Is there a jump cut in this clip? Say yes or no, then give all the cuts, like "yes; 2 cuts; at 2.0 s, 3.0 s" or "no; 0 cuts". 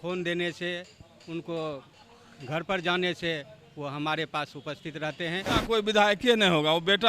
yes; 1 cut; at 5.5 s